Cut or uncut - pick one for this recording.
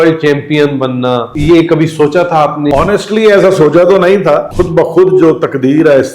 cut